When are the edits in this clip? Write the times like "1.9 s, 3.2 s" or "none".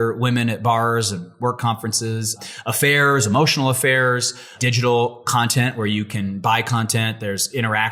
2.4 s, 4.5 s